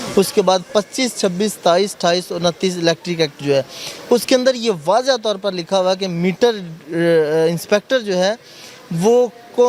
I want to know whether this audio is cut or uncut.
uncut